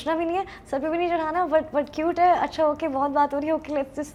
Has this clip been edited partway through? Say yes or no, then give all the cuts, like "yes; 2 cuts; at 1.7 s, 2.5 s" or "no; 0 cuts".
no; 0 cuts